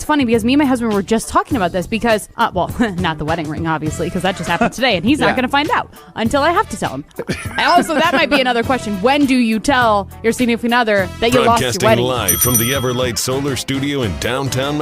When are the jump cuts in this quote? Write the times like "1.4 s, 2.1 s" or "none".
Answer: 12.0 s